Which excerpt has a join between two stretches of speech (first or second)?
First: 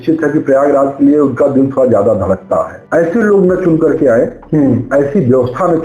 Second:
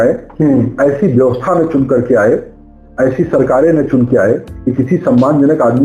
first